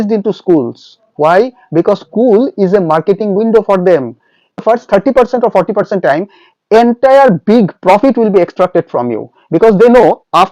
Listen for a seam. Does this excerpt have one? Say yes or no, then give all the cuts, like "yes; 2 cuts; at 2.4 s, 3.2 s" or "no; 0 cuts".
yes; 1 cut; at 4.6 s